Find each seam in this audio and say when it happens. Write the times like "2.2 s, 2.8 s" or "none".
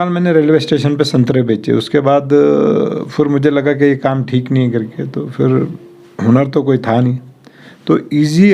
none

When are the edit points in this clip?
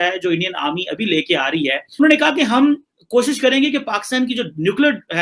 2.0 s

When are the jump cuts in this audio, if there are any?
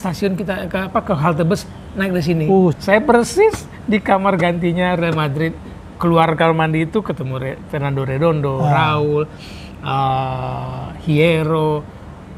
2.8 s

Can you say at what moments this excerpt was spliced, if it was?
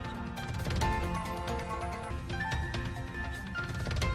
none

